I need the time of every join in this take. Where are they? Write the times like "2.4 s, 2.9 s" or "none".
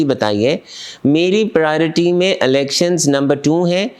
none